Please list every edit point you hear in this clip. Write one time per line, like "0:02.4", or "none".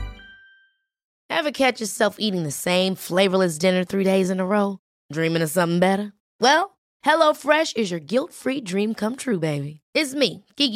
0:01.1